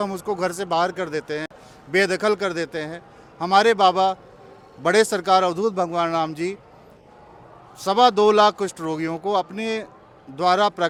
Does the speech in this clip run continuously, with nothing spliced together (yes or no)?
yes